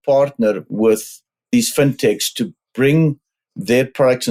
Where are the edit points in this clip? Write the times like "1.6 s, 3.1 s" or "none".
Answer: none